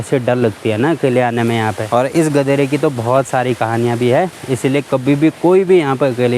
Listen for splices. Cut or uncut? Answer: cut